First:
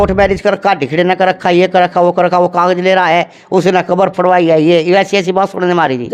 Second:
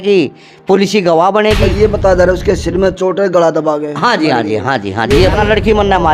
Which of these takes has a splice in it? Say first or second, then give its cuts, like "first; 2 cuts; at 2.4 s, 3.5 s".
second; 2 cuts; at 1.7 s, 5.3 s